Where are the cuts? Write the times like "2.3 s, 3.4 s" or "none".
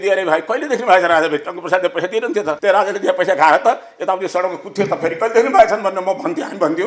none